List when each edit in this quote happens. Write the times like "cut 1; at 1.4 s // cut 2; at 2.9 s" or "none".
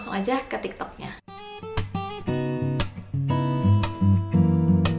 cut 1; at 1.2 s